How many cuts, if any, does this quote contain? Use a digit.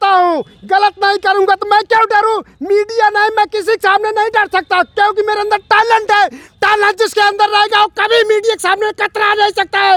0